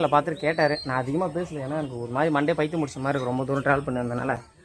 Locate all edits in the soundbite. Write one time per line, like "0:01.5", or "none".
none